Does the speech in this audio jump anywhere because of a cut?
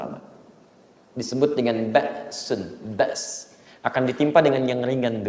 no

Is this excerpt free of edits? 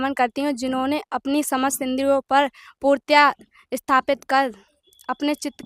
yes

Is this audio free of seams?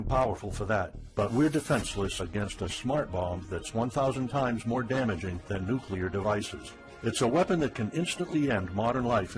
no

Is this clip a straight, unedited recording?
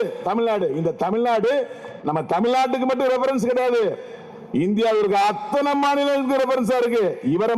yes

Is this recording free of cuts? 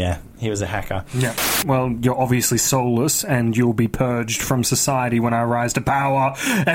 no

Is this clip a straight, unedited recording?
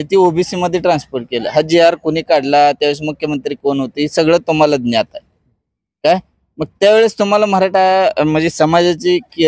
yes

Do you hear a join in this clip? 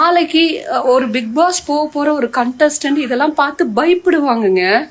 no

